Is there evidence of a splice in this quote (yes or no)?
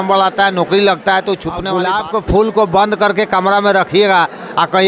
yes